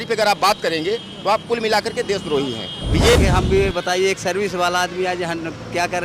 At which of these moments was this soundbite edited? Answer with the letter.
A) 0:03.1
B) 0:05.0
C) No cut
A